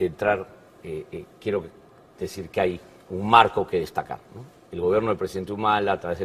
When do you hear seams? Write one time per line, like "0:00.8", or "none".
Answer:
none